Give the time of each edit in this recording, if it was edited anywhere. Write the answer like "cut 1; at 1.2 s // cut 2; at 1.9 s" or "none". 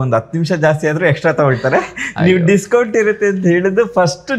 none